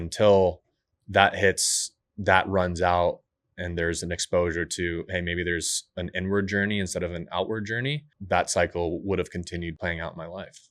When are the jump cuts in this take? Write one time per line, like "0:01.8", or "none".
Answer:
0:08.1
0:09.8

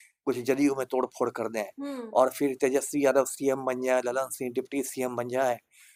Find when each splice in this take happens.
none

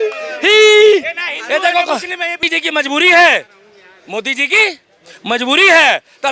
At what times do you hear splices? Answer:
0:02.5

